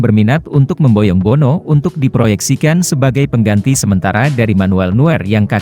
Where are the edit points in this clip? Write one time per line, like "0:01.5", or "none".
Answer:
none